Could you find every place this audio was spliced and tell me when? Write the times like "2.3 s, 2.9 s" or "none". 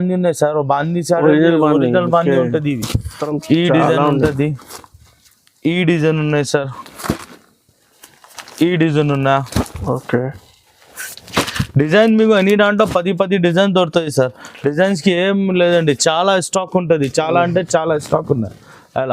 3.3 s